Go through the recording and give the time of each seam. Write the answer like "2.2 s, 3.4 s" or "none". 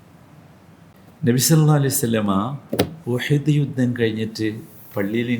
0.9 s, 3.0 s